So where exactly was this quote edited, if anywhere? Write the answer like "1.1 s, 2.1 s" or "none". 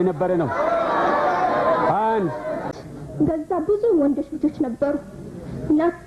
2.7 s